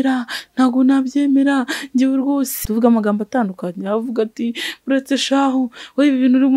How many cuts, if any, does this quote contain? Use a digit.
1